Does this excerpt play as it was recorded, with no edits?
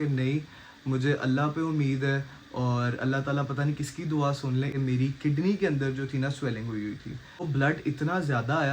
no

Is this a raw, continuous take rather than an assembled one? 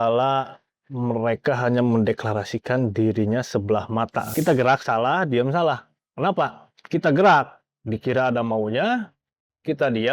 no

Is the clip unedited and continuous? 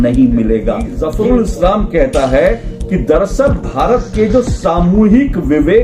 no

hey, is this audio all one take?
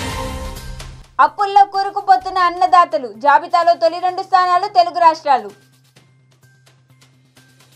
yes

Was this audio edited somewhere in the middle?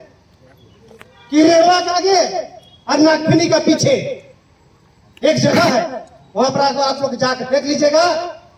no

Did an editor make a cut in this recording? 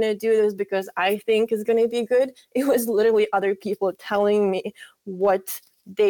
no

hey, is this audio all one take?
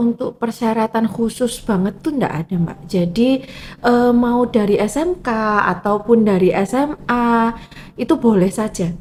yes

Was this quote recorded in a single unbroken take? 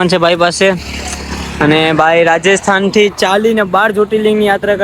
yes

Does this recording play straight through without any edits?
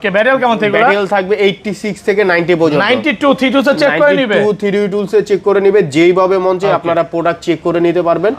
yes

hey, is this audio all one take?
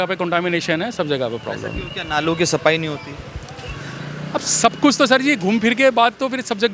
yes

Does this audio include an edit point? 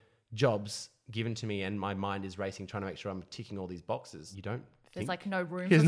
yes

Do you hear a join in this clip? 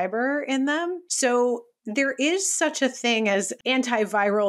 yes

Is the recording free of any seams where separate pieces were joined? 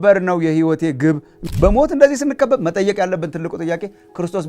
no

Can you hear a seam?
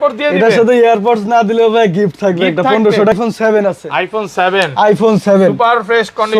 yes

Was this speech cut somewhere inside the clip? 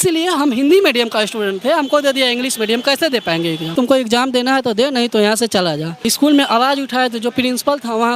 yes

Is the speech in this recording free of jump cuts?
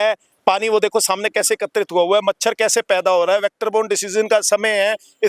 yes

